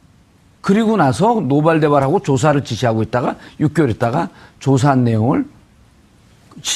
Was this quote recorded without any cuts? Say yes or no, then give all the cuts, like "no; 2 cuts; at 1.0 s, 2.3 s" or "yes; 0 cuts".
no; 1 cut; at 4.8 s